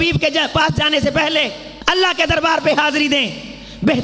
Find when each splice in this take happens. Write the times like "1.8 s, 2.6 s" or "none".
1.7 s